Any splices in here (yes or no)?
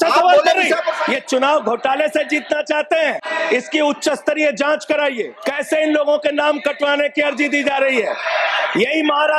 yes